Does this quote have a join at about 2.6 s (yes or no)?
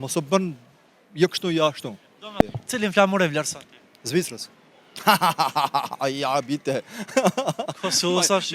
yes